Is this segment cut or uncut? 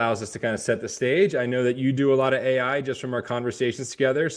uncut